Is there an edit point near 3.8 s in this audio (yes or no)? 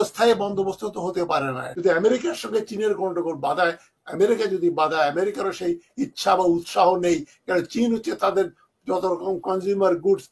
no